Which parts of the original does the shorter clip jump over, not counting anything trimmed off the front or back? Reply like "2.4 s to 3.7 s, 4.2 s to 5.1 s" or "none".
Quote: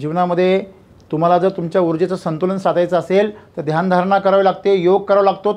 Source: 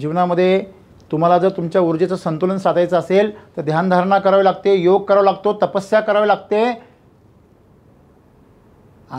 none